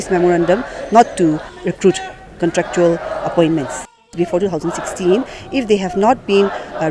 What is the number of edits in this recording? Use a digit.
2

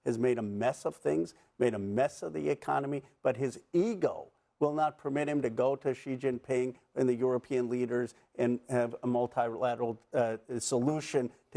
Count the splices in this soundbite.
0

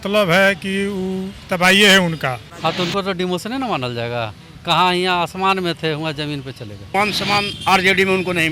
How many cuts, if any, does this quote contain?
2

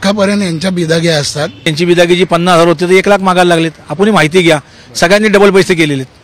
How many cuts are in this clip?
1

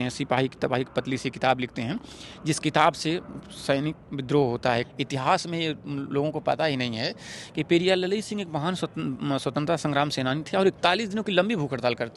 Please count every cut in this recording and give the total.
1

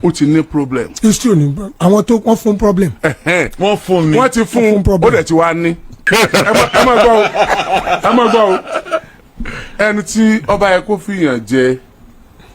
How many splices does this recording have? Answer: 1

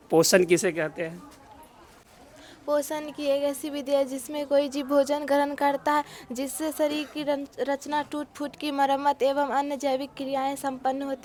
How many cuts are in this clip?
0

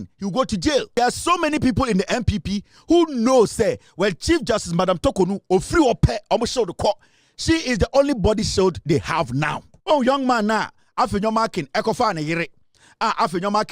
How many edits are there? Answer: 2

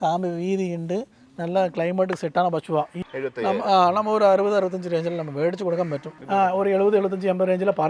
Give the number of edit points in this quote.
2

